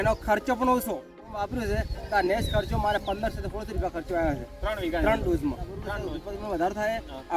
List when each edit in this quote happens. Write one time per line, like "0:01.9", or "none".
0:01.3
0:05.9